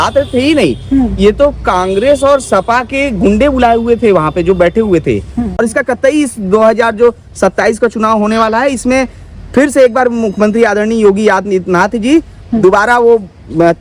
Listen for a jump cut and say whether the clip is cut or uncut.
cut